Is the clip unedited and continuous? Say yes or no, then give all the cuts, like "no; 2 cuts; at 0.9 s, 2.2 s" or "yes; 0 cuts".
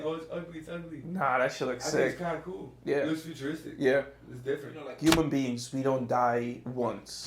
no; 1 cut; at 5.0 s